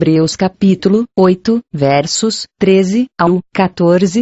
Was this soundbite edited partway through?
yes; 1 cut; at 1.1 s

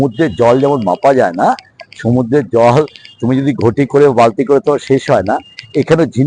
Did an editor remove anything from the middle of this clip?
no; 0 cuts

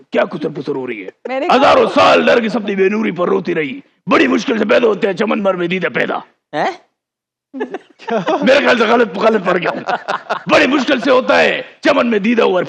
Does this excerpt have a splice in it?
no; 0 cuts

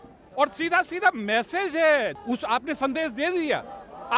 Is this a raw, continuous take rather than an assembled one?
no; 1 cut; at 2.2 s

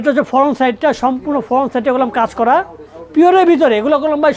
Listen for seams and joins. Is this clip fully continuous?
yes; 0 cuts

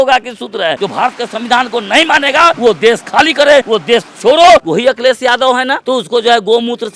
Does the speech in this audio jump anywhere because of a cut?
yes; 5 cuts; at 0.8 s, 2.6 s, 3.7 s, 4.7 s, 5.8 s

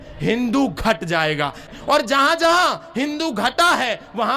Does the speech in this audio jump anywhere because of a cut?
yes; 1 cut; at 1.7 s

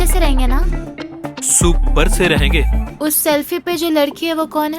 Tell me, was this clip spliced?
yes; 1 cut; at 2.9 s

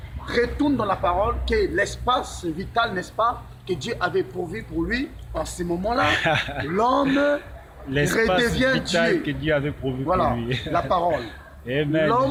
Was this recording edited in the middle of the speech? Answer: no; 0 cuts

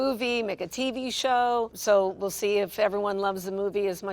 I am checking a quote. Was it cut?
yes; 1 cut; at 1.7 s

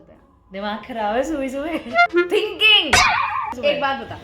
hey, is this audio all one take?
no; 2 cuts; at 2.1 s, 3.5 s

